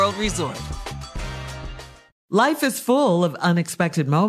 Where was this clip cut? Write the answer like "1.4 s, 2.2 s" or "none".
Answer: 2.1 s